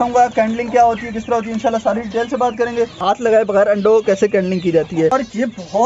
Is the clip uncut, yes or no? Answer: no